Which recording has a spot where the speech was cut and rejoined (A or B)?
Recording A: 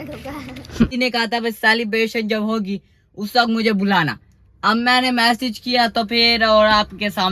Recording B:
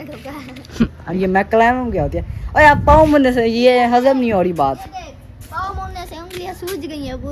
A